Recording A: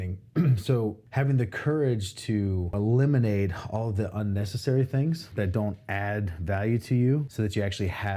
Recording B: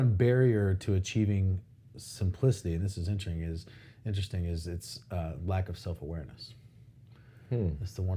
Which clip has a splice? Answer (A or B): A